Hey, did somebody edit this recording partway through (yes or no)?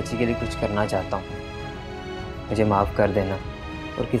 no